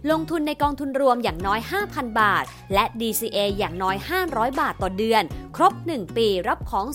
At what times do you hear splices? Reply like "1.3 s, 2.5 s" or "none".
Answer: none